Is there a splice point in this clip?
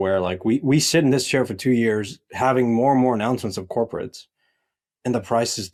no; 0 cuts

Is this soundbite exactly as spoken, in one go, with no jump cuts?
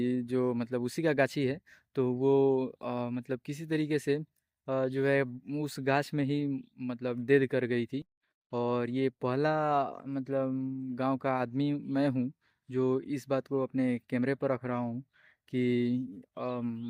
yes; 0 cuts

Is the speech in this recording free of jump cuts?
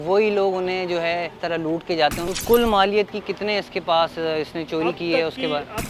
no; 2 cuts; at 1.4 s, 2.2 s

